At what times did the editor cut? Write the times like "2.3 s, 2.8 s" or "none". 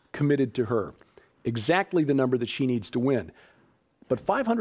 2.4 s